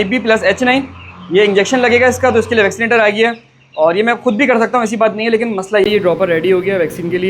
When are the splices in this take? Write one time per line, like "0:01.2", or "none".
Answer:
0:05.8